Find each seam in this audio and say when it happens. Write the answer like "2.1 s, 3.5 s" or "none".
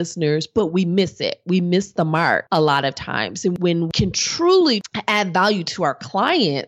2.4 s, 3.6 s, 4.9 s